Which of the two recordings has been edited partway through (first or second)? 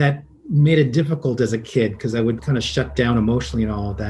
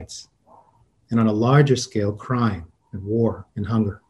first